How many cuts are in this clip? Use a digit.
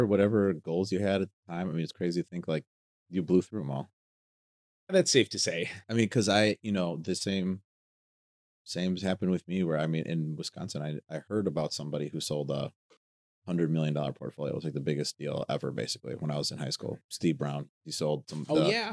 0